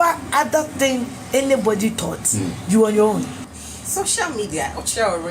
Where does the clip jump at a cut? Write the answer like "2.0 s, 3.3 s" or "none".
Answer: 3.4 s

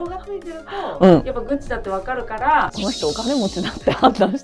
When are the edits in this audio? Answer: 2.7 s

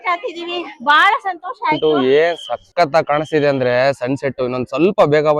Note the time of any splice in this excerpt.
1.8 s

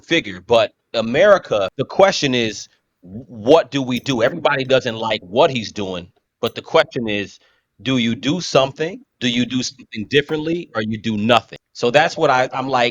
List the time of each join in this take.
1.8 s, 9.1 s, 11.6 s

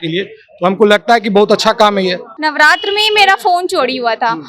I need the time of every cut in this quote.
2.3 s

